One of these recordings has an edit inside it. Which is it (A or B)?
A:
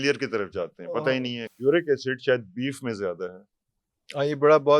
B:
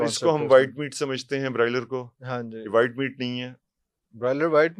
A